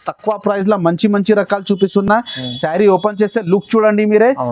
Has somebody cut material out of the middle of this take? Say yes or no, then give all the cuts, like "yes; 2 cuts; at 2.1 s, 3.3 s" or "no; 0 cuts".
no; 0 cuts